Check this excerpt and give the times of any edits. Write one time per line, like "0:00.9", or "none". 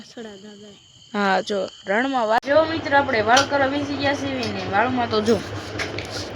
0:02.4